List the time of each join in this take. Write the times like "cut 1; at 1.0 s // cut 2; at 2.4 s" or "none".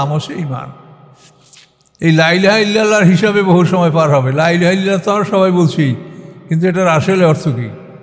none